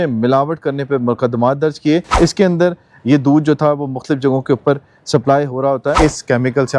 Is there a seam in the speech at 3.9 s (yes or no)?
no